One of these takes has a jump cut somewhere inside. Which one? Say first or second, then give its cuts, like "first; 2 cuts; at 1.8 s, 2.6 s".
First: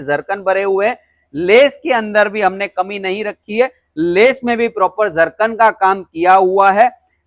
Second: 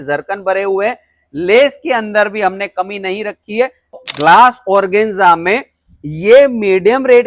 second; 1 cut; at 4.0 s